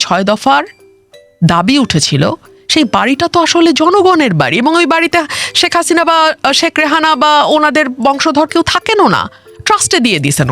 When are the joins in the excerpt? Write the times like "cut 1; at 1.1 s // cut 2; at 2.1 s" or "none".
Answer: none